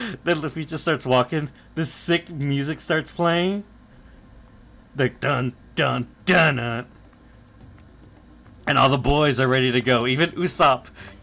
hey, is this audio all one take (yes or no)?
yes